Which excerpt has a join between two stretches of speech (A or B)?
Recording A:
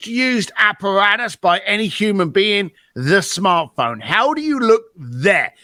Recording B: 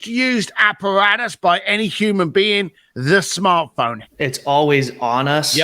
B